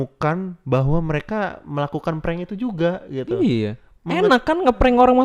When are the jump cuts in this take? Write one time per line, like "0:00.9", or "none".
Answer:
0:03.8